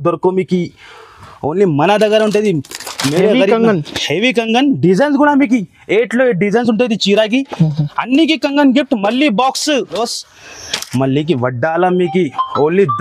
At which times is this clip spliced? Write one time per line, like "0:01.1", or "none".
0:10.0

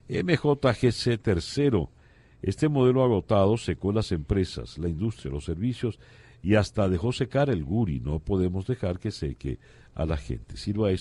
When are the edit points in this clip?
none

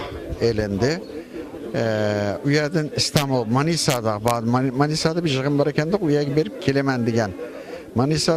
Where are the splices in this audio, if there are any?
none

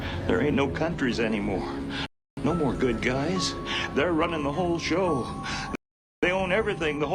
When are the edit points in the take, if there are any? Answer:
none

